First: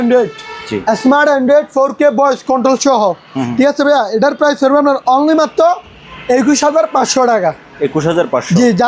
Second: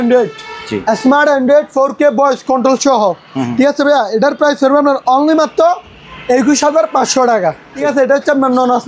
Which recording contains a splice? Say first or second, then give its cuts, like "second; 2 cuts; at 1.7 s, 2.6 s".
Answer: second; 1 cut; at 7.9 s